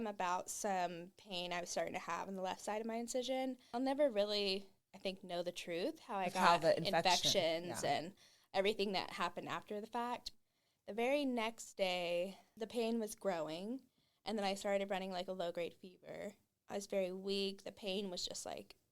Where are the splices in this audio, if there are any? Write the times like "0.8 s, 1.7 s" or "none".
3.6 s, 10.3 s, 12.5 s, 16.5 s

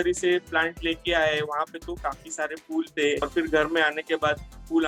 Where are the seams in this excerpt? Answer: none

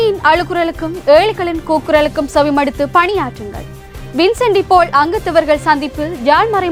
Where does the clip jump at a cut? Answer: none

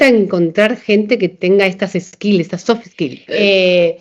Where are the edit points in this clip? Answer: 1.3 s, 3.2 s

